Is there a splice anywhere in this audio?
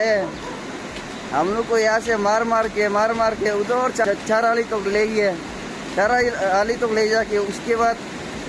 no; 0 cuts

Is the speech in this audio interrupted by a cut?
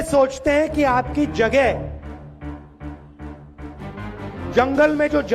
yes; 2 cuts; at 1.8 s, 3.9 s

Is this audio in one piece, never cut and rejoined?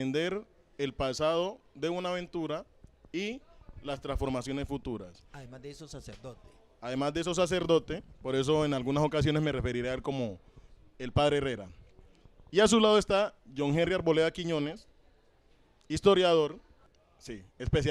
no; 1 cut; at 1.7 s

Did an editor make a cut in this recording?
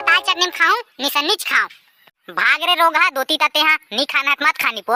no; 0 cuts

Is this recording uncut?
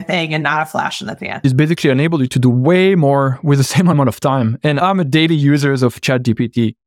no; 1 cut; at 1.4 s

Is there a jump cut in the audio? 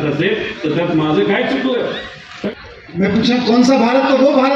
yes; 1 cut; at 2.5 s

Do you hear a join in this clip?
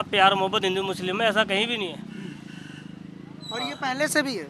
no; 0 cuts

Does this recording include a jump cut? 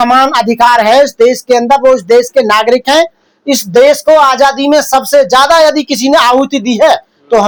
no; 0 cuts

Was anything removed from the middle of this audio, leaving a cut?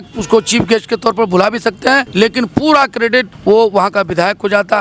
yes; 2 cuts; at 2.1 s, 3.3 s

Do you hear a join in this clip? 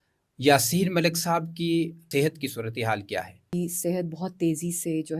yes; 2 cuts; at 2.0 s, 3.5 s

